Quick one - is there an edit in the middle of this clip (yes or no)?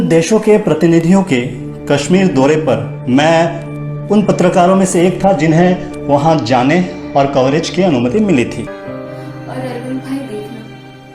yes